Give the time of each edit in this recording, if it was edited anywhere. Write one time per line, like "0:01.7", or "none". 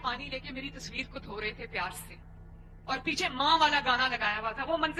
none